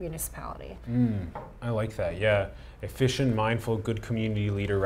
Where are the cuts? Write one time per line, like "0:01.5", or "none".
none